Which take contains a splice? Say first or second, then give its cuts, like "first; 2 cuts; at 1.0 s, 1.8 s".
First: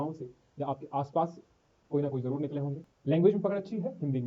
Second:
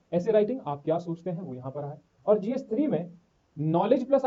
first; 1 cut; at 2.9 s